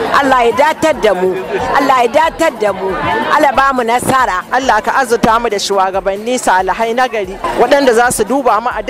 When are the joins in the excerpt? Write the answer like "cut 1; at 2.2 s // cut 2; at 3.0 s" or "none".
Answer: cut 1; at 4.4 s // cut 2; at 7.5 s